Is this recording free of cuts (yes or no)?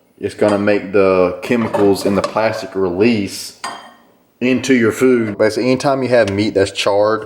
no